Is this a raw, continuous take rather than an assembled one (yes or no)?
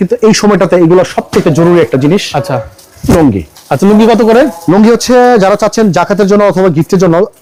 yes